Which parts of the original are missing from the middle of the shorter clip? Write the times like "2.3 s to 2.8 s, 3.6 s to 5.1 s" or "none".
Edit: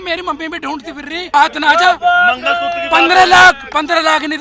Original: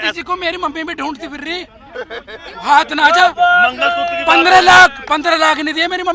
1.7 s to 2.7 s